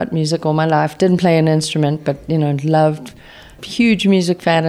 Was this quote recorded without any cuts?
no; 1 cut; at 3.6 s

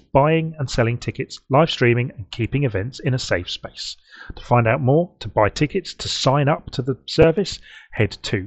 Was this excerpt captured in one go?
yes; 0 cuts

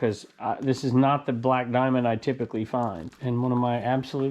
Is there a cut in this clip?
yes; 1 cut; at 3.1 s

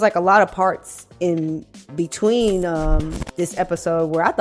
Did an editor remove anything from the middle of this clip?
no; 0 cuts

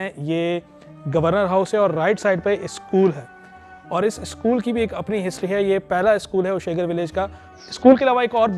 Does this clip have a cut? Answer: no; 0 cuts

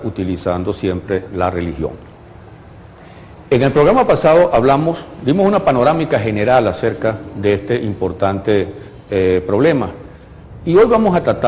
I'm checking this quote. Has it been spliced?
yes; 1 cut; at 4.9 s

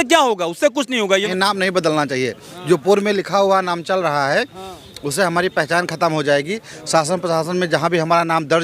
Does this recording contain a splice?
yes; 1 cut; at 1.3 s

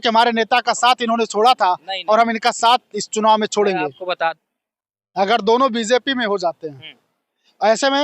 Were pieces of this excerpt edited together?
yes; 1 cut; at 4.4 s

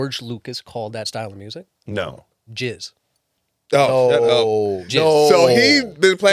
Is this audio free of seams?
no; 2 cuts; at 1.1 s, 2.3 s

